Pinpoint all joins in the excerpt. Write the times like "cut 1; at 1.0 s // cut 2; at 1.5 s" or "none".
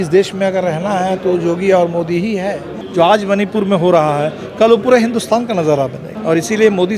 cut 1; at 2.8 s // cut 2; at 6.1 s